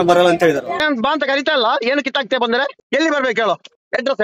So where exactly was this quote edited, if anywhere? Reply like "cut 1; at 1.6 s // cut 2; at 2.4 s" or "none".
cut 1; at 0.8 s // cut 2; at 2.8 s

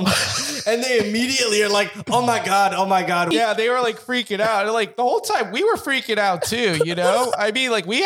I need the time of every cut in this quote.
cut 1; at 3.3 s

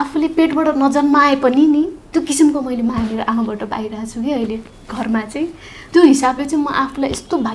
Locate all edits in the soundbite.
cut 1; at 5.7 s

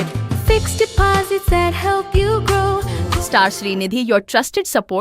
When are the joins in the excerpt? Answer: cut 1; at 3.0 s

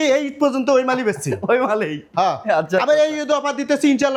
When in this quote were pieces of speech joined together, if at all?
none

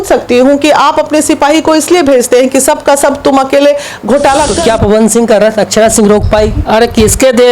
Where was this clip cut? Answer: cut 1; at 4.5 s

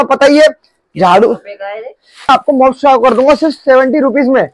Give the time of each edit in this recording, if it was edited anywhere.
cut 1; at 2.3 s

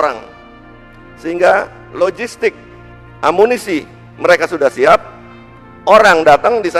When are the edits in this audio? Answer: none

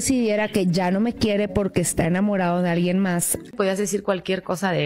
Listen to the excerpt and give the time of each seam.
cut 1; at 3.5 s

